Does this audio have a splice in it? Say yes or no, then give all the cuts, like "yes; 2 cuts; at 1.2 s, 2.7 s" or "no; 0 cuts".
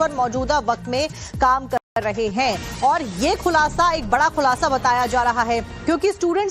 no; 0 cuts